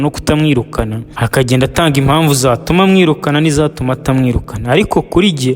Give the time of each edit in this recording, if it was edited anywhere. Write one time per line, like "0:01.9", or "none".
0:01.0